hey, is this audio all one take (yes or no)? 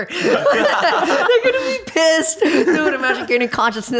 no